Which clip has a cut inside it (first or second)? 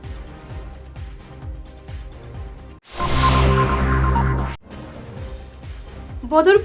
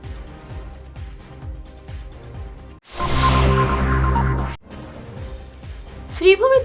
first